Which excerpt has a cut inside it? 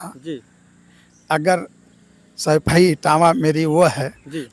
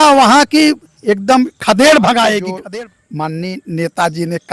second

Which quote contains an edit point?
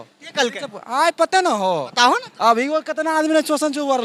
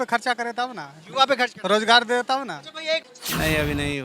second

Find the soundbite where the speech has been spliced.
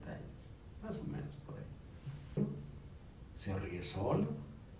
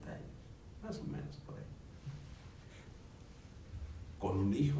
first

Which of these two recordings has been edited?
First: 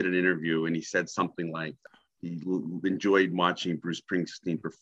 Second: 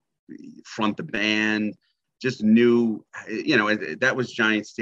first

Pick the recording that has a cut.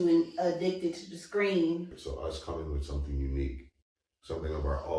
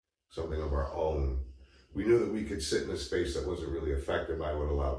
first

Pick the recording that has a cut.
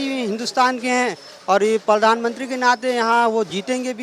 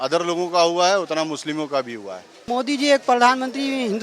second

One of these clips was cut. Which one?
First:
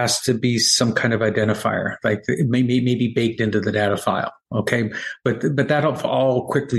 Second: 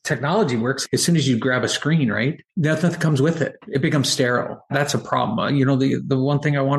second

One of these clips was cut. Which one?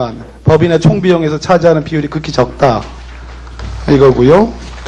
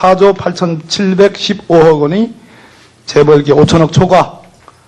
first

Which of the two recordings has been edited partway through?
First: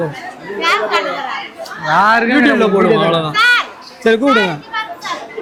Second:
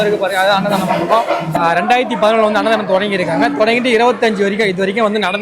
second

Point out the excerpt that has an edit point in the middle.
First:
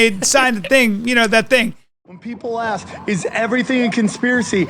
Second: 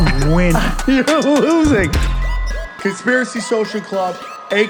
first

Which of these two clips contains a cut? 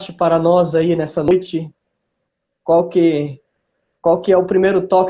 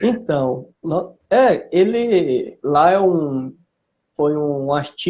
first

